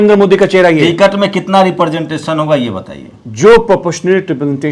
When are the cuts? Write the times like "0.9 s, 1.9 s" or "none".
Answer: none